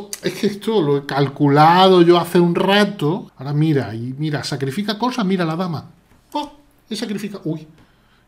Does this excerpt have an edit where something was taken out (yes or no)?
yes